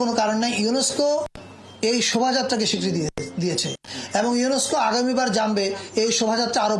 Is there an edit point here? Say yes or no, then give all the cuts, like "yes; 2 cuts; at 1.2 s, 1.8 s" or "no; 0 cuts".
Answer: no; 0 cuts